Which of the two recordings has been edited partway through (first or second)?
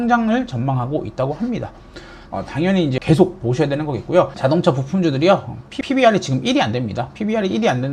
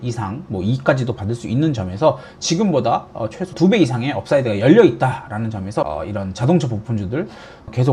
first